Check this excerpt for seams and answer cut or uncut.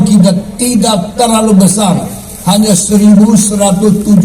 uncut